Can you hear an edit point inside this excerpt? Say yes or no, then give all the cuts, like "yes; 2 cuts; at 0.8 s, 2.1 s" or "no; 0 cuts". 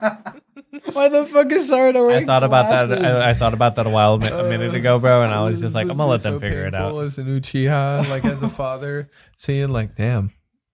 no; 0 cuts